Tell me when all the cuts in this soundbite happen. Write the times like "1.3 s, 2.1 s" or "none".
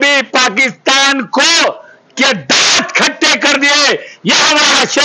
none